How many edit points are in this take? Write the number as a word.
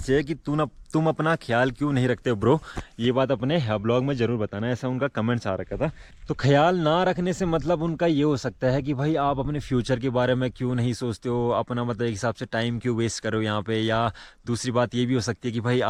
zero